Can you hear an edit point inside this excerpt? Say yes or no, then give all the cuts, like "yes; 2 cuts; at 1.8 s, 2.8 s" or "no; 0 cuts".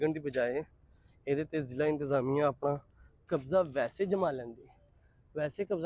no; 0 cuts